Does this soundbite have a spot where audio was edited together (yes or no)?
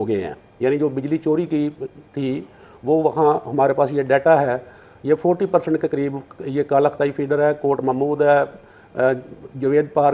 no